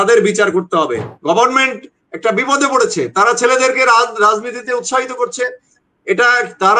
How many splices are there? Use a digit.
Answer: 1